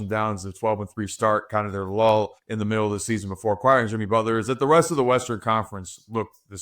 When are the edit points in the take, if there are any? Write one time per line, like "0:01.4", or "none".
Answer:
0:02.4